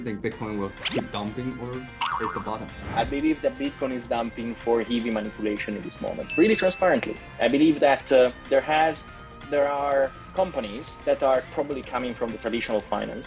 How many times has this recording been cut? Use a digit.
1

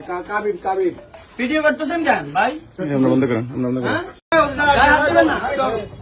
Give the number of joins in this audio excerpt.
1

